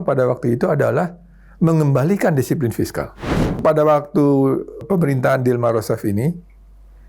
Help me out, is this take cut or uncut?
cut